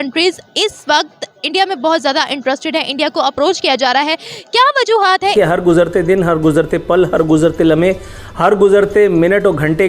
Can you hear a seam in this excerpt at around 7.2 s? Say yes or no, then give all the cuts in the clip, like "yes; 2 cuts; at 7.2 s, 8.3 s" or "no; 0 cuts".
no; 1 cut; at 5.3 s